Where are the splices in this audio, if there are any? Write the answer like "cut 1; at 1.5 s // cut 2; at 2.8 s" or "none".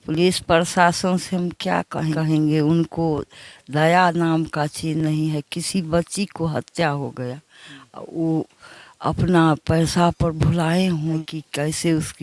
cut 1; at 2.1 s // cut 2; at 11.2 s